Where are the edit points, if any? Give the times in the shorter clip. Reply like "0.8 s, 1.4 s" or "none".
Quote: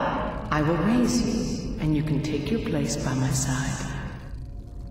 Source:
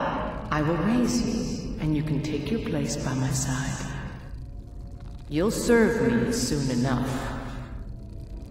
none